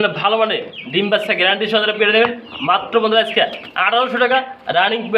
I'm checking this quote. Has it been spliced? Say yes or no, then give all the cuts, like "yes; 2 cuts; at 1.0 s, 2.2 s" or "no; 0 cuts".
no; 0 cuts